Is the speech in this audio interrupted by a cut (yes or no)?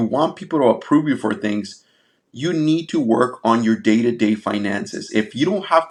no